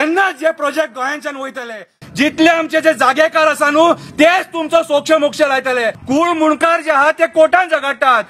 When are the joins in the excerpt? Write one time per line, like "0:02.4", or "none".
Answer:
0:02.0
0:06.0